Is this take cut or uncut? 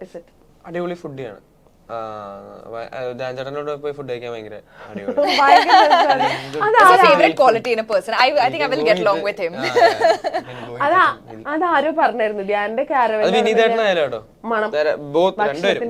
uncut